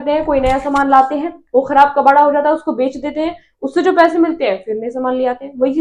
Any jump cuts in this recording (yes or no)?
no